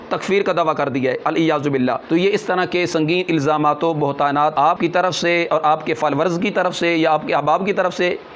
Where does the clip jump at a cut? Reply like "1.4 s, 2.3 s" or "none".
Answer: 2.0 s, 4.7 s

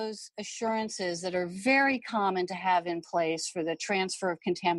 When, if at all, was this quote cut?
none

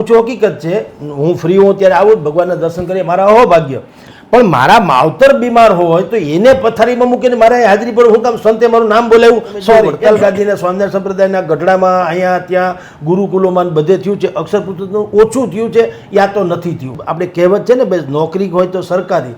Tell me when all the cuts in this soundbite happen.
9.9 s, 17.0 s

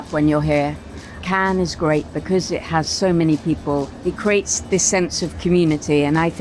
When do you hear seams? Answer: 1.1 s, 3.9 s

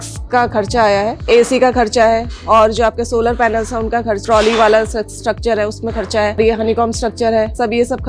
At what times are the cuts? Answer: 1.3 s, 4.2 s, 6.4 s

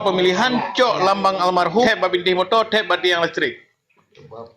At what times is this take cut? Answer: 1.9 s

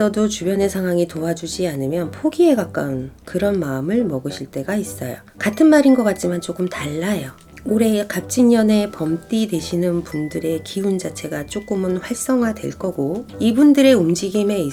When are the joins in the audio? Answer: none

